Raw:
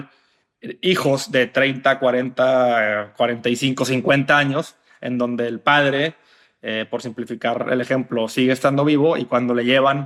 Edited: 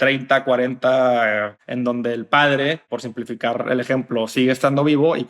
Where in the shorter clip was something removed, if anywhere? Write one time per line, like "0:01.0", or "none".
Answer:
0:01.5
0:02.9